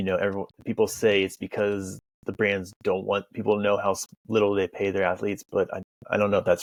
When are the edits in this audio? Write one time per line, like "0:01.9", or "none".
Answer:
none